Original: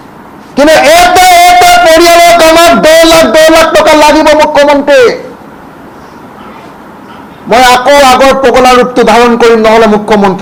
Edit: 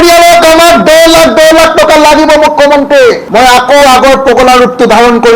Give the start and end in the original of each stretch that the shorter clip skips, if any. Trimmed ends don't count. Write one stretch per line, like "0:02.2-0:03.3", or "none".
0:05.2-0:07.4